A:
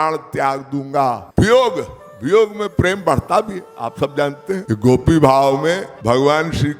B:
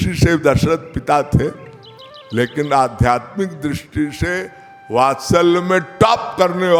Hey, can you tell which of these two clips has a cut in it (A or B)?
A